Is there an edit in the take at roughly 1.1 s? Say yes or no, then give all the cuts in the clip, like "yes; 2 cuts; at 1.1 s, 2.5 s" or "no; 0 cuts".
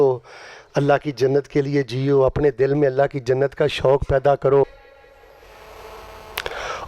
no; 1 cut; at 4.6 s